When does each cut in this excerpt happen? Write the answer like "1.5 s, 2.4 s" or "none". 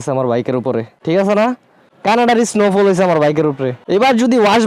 none